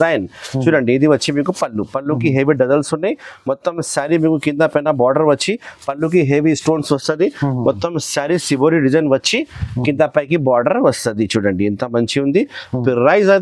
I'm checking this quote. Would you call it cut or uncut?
uncut